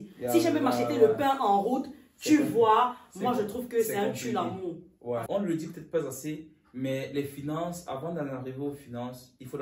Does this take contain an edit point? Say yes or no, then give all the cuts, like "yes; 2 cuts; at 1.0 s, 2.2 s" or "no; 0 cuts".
yes; 1 cut; at 5.2 s